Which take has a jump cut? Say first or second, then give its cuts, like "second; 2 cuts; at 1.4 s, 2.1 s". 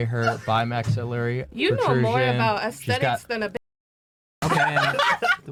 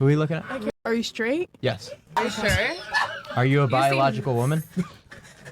second; 2 cuts; at 0.7 s, 2.1 s